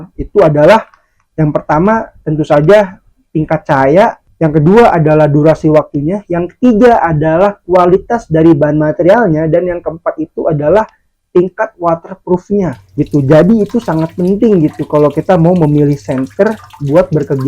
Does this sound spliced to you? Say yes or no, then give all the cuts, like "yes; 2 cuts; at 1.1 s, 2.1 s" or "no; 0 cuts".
no; 0 cuts